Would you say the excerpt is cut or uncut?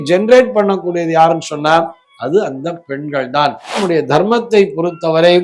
cut